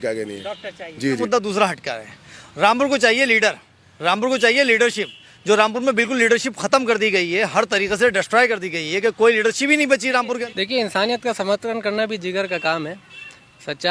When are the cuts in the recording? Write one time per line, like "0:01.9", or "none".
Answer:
0:01.2
0:10.5